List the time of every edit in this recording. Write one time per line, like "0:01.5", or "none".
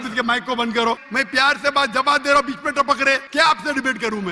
0:01.1
0:03.2